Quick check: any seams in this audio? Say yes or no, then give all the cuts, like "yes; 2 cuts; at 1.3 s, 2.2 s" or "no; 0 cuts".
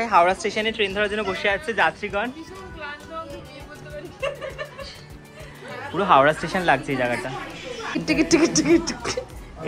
yes; 1 cut; at 8.0 s